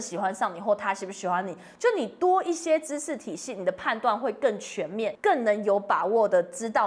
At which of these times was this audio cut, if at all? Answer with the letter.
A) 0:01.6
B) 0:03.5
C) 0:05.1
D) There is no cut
C